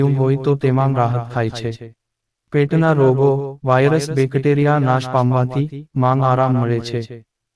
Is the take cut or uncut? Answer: uncut